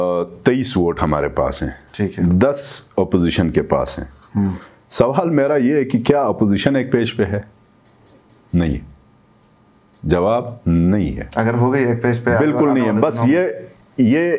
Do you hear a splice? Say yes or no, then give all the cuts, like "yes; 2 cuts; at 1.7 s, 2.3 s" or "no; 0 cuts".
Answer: no; 0 cuts